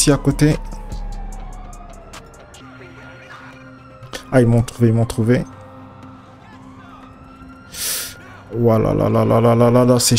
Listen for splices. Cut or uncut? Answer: uncut